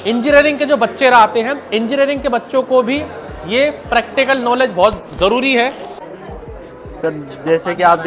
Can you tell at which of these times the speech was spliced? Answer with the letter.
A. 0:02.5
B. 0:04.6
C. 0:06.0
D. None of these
C